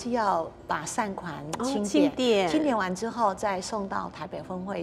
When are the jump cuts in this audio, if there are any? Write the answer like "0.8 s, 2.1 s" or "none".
none